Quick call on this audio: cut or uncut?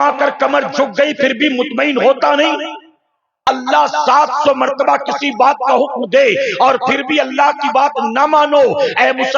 cut